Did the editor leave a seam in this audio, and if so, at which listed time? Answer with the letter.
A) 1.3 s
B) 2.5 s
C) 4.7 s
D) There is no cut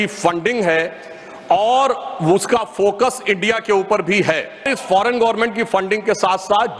C